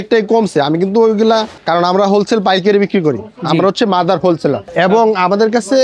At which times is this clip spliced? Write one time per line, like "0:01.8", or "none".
0:01.6
0:04.7